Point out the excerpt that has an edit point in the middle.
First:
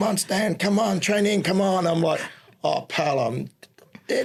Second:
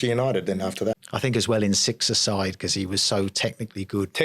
second; 1 cut; at 1.0 s

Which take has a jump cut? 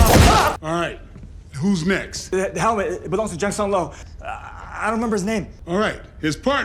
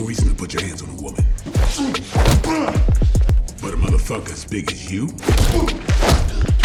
first; 1 cut; at 4.0 s

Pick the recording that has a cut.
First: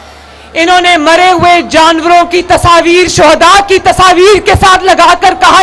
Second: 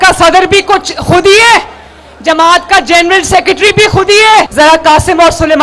second; 1 cut; at 4.5 s

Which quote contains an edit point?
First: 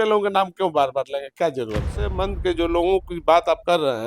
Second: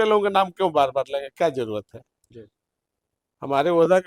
first; 1 cut; at 2.1 s

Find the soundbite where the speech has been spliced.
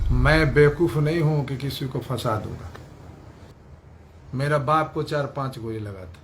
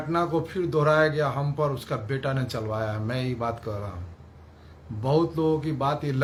first; 1 cut; at 3.5 s

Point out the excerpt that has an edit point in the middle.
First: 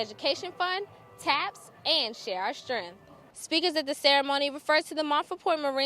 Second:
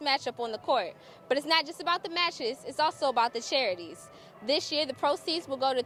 first; 1 cut; at 3.3 s

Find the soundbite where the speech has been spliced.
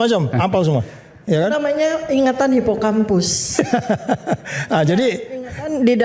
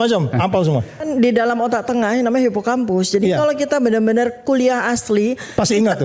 second; 1 cut; at 0.9 s

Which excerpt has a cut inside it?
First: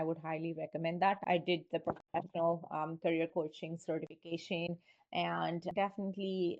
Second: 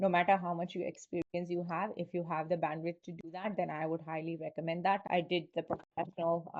first; 1 cut; at 5.7 s

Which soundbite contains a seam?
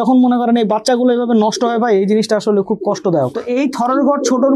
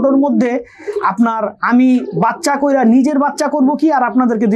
first; 1 cut; at 3.4 s

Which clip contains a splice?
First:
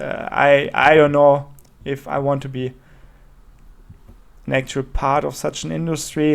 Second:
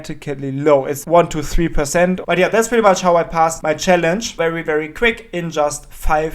second; 4 cuts; at 1.0 s, 2.2 s, 3.6 s, 4.4 s

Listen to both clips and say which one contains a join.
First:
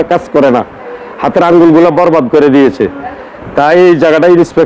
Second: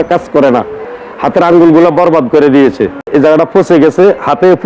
second; 1 cut; at 3.1 s

